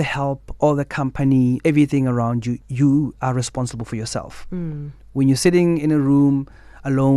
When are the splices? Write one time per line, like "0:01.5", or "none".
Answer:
0:01.6
0:02.6